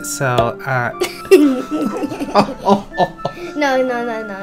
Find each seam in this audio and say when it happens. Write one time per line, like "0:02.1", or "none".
0:01.2